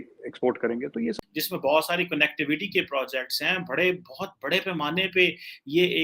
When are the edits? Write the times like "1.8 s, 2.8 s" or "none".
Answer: 1.1 s